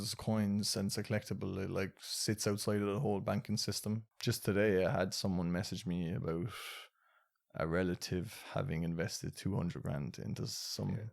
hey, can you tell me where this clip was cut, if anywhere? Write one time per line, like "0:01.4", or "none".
0:04.1

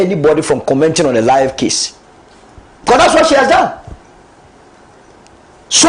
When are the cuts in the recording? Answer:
none

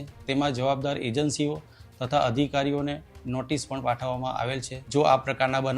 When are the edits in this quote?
0:04.7

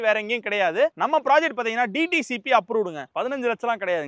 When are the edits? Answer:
0:03.0

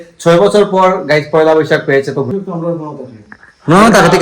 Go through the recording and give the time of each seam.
0:02.3

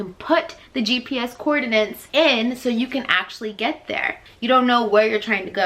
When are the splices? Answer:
0:02.0
0:04.2

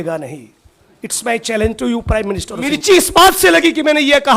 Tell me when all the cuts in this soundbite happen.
0:02.8

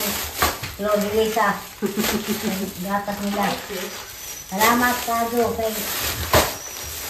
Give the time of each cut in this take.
none

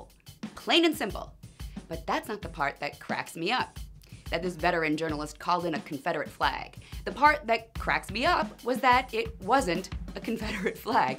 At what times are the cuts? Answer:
0:06.9

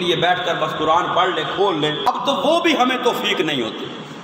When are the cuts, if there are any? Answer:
0:02.1

